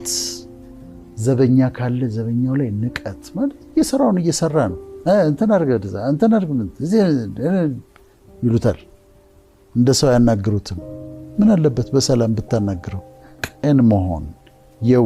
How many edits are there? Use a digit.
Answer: 1